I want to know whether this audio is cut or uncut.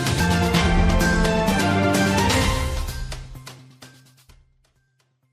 cut